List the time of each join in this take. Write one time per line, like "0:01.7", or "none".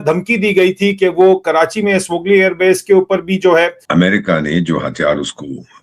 0:03.8